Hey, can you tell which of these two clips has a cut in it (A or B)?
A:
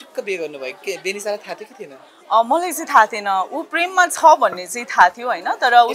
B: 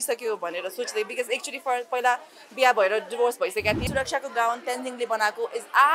B